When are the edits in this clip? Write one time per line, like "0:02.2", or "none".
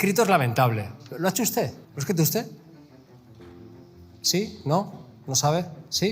0:01.0
0:01.9